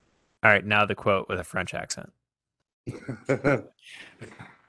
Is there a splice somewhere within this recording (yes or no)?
no